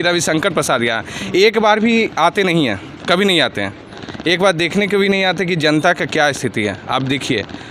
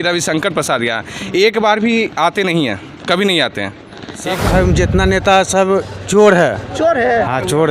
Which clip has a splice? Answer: second; 1 cut; at 4.2 s

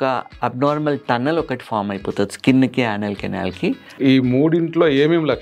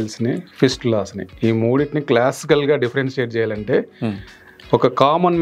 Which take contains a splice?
first; 1 cut; at 4.0 s

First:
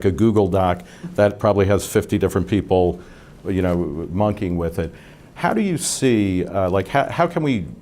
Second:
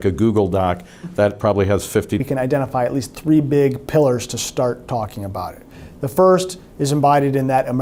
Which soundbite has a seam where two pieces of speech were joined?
first; 1 cut; at 2.2 s

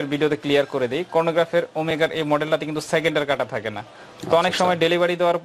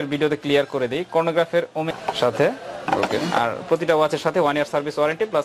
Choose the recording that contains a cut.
second; 1 cut; at 1.9 s

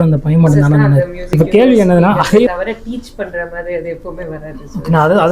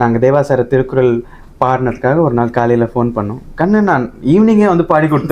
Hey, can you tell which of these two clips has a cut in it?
first; 1 cut; at 2.5 s

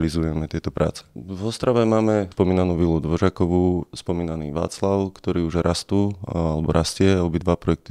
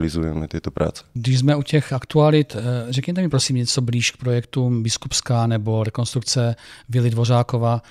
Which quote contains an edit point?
first; 2 cuts; at 1.1 s, 2.3 s

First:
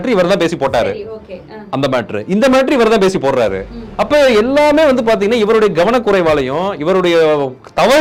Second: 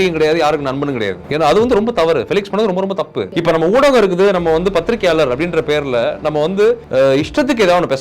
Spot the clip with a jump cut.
second; 3 cuts; at 1.2 s, 3.2 s, 6.8 s

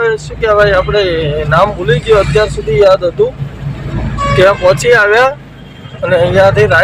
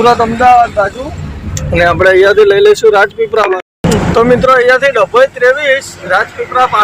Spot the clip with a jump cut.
second; 1 cut; at 3.5 s

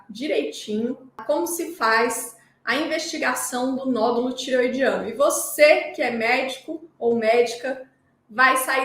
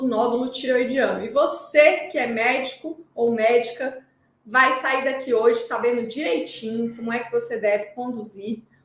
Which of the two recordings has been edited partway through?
first; 1 cut; at 1.2 s

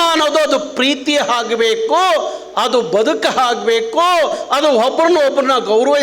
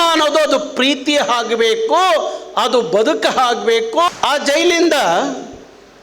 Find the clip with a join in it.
second; 1 cut; at 4.1 s

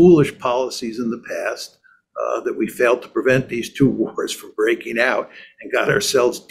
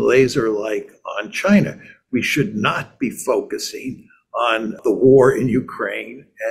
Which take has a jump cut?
second; 1 cut; at 4.8 s

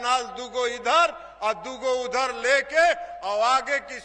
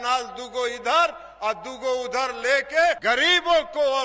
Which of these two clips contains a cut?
second; 1 cut; at 3.0 s

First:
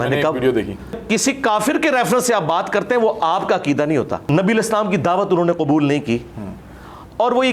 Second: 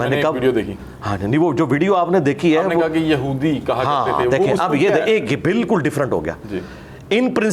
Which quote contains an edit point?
first; 2 cuts; at 1.0 s, 4.2 s

